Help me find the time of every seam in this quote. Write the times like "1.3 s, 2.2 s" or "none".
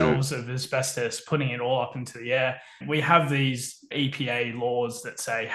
2.8 s